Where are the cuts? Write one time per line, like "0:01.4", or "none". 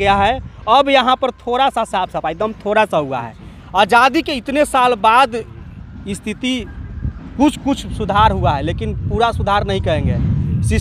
none